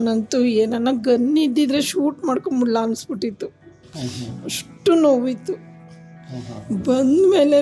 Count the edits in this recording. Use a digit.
0